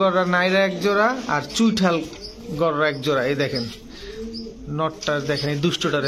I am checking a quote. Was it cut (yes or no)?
no